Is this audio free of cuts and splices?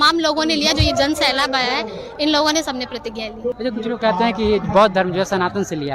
no; 1 cut; at 3.6 s

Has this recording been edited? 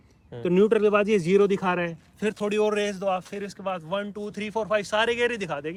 no; 0 cuts

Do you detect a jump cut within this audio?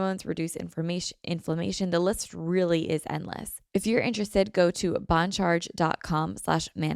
yes; 1 cut; at 3.5 s

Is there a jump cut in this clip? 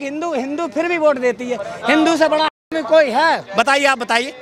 no; 0 cuts

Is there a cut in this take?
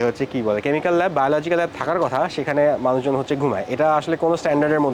no; 0 cuts

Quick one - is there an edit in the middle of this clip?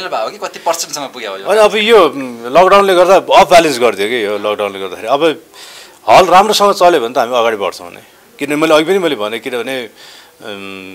no; 0 cuts

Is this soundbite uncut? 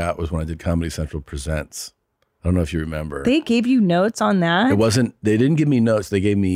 yes; 0 cuts

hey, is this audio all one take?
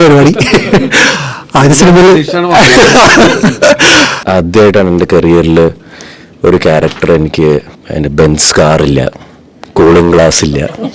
no; 2 cuts; at 4.2 s, 7.8 s

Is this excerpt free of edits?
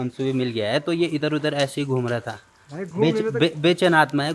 yes; 0 cuts

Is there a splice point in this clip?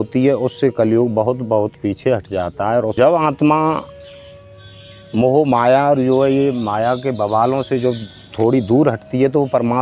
yes; 1 cut; at 2.9 s

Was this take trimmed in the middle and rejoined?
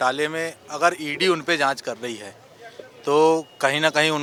no; 0 cuts

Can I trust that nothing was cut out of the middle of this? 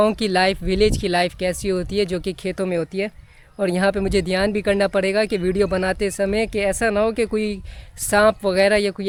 yes; 0 cuts

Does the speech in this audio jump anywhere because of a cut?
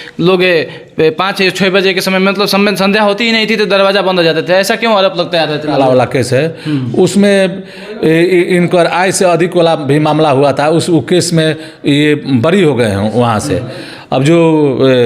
yes; 1 cut; at 5.8 s

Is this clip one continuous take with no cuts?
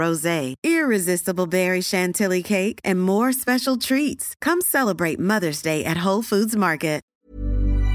no; 1 cut; at 7.0 s

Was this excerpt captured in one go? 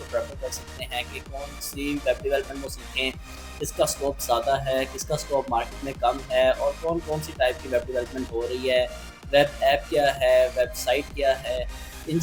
yes; 0 cuts

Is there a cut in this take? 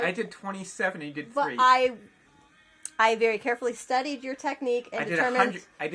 no; 0 cuts

